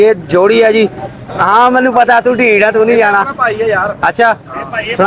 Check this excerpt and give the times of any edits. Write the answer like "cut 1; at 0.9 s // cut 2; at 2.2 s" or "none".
none